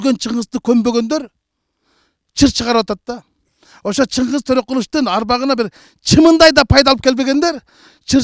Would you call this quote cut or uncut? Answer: uncut